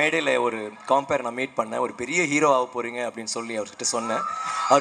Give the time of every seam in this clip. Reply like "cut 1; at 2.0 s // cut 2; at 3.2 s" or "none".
none